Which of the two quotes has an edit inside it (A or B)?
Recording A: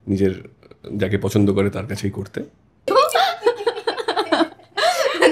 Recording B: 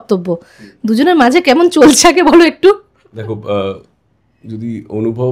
A